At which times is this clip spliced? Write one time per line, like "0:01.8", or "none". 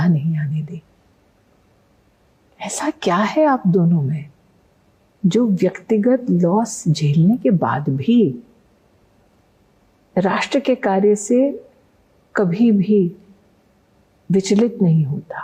none